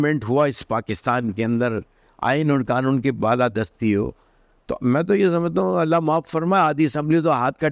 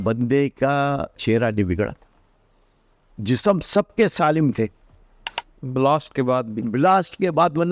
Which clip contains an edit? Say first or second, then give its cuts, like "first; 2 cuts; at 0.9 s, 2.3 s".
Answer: second; 1 cut; at 1.2 s